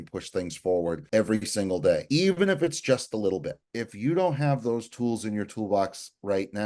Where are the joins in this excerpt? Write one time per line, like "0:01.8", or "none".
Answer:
0:01.0
0:02.0
0:03.6